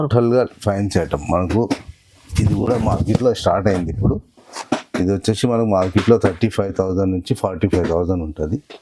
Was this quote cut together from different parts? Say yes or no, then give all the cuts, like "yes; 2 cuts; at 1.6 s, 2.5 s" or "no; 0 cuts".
no; 0 cuts